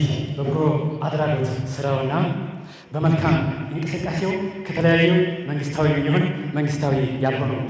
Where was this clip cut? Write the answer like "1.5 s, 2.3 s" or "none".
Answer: none